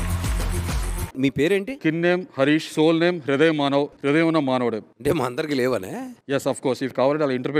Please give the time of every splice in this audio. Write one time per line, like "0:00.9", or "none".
none

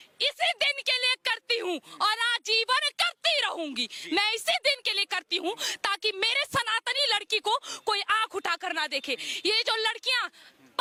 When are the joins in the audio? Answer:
none

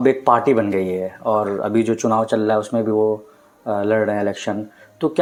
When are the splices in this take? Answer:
none

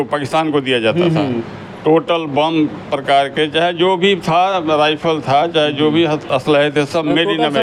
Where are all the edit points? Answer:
none

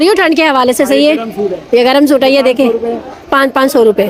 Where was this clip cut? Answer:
none

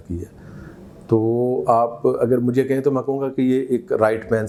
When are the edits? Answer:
none

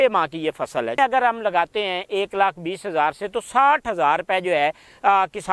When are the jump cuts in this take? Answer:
0:01.0

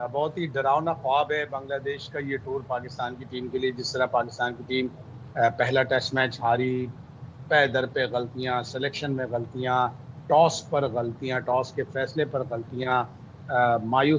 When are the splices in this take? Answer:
none

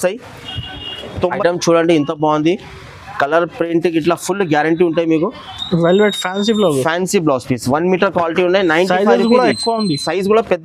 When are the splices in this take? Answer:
0:01.4

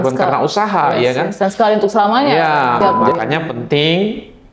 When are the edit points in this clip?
0:02.8

